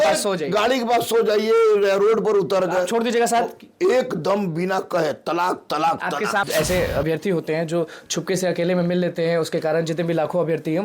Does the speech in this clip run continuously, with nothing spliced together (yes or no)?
no